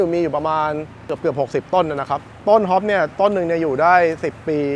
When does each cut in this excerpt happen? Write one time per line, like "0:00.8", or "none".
none